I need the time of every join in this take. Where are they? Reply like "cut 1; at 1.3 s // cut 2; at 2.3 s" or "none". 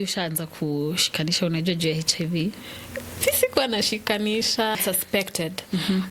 cut 1; at 4.8 s